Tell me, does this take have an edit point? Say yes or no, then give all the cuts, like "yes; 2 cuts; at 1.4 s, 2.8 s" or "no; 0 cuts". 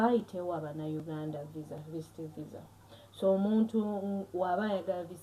no; 0 cuts